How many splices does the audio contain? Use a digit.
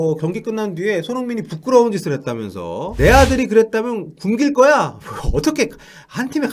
1